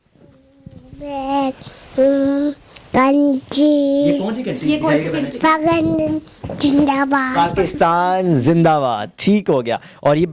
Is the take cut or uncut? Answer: uncut